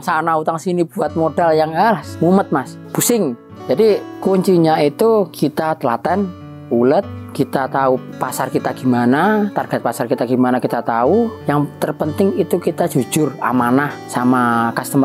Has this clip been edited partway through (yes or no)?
yes